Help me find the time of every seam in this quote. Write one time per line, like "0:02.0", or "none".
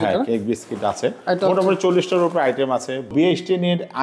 0:03.1

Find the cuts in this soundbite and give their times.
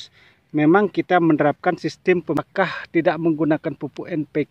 0:02.4

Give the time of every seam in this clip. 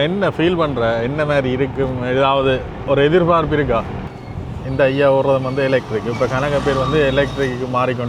0:04.3

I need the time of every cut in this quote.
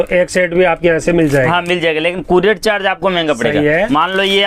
none

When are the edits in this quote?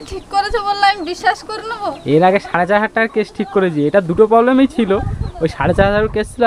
none

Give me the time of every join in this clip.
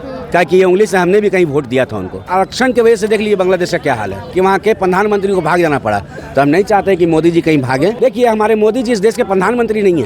0:02.3
0:04.2
0:08.0

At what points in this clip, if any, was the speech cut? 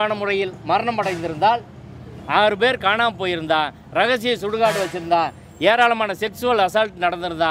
none

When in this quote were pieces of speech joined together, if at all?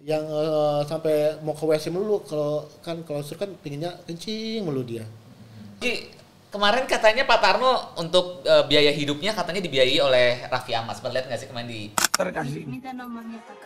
0:05.8

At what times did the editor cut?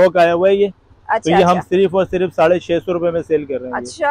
none

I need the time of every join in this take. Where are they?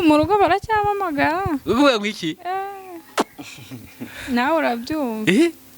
none

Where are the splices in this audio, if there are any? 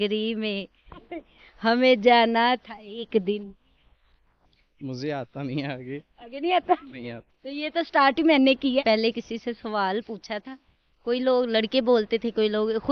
0:08.8

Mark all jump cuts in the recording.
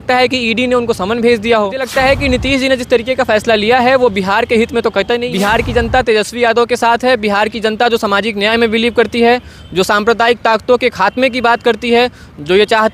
0:01.9
0:05.3

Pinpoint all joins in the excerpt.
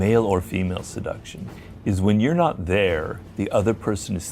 0:03.2

